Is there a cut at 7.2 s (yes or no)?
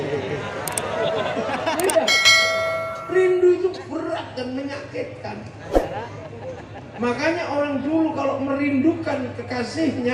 no